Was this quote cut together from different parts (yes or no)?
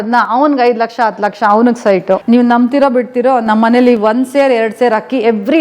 yes